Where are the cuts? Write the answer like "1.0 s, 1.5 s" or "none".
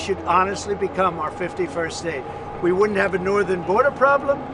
none